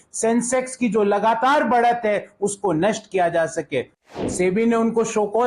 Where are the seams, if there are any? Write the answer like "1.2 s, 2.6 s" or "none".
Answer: 4.0 s